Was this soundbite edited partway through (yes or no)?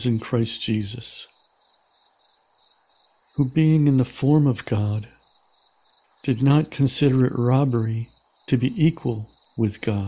yes